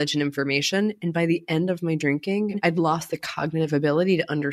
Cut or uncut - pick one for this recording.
cut